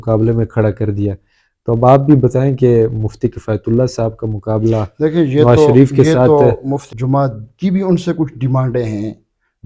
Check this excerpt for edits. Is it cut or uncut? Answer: cut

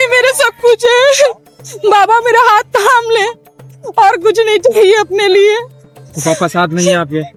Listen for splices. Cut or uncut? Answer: uncut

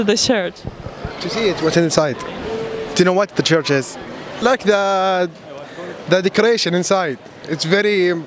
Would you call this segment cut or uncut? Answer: uncut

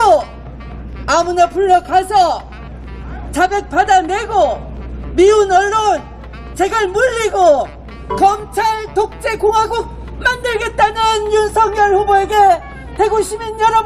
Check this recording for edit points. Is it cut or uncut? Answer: uncut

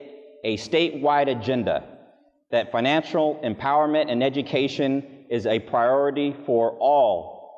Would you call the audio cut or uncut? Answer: uncut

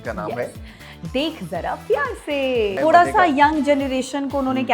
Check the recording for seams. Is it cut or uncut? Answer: cut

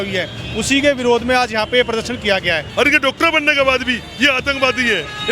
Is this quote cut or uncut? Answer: cut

